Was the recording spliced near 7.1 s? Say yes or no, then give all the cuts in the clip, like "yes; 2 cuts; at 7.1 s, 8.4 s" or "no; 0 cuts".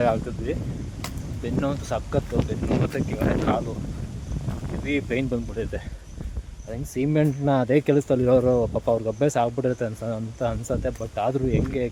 no; 0 cuts